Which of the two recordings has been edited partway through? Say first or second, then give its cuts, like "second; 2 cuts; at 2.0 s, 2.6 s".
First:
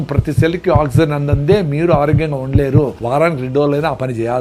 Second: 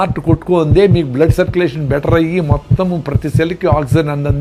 first; 1 cut; at 3.0 s